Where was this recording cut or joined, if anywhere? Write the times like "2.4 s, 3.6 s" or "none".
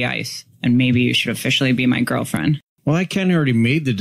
2.7 s